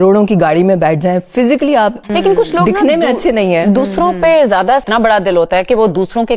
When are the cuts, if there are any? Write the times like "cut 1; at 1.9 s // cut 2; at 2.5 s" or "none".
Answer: none